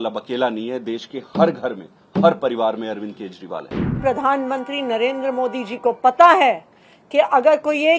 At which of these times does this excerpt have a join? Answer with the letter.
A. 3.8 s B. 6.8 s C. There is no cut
A